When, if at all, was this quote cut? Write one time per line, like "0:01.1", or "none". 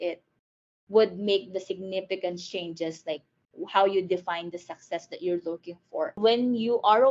0:06.2